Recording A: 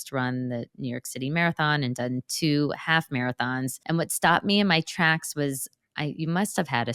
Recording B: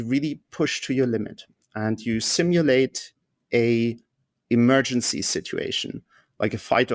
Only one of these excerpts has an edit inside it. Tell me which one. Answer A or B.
A